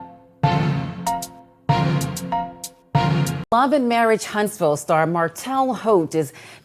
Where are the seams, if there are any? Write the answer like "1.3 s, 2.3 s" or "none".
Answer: 3.4 s